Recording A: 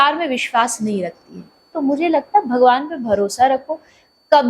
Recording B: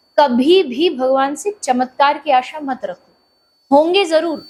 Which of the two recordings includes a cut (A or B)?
A